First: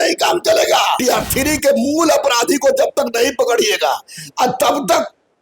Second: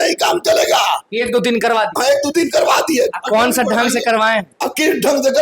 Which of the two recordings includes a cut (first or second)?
first